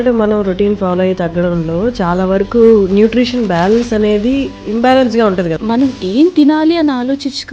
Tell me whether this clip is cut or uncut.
cut